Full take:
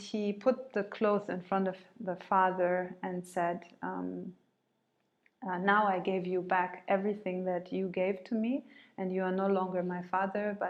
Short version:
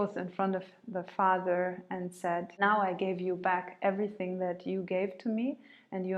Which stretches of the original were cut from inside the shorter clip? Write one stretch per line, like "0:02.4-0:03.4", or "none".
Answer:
0:03.7-0:05.6